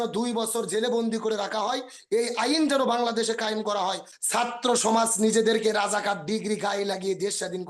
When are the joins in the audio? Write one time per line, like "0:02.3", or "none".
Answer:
0:04.1